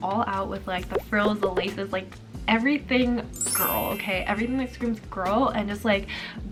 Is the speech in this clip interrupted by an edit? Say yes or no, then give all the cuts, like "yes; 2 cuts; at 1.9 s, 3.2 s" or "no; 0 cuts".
no; 0 cuts